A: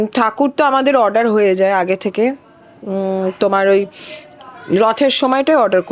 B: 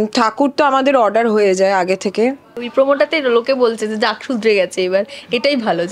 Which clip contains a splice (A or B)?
B